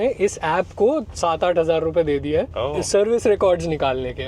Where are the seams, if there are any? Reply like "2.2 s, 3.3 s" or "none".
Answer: 2.6 s